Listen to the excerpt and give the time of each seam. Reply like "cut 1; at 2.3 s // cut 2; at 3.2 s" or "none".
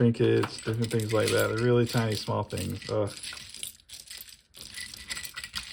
none